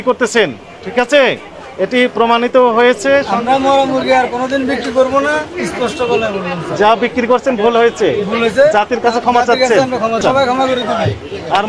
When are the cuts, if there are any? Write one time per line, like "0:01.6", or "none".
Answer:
0:03.3
0:10.2